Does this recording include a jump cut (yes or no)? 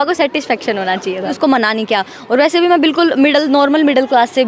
yes